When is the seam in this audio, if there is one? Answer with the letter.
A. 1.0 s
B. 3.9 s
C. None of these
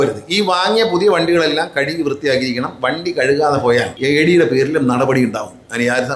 B